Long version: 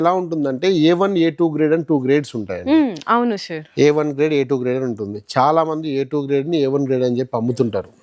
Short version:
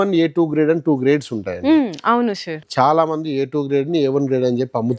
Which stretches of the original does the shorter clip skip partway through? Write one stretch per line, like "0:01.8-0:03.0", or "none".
0:03.6-0:05.1